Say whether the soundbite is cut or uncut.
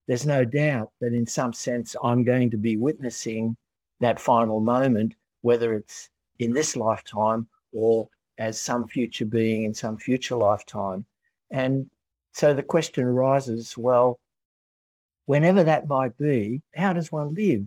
cut